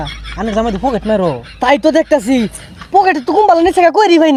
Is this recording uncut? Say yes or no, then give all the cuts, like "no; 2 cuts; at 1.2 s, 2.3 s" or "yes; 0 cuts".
yes; 0 cuts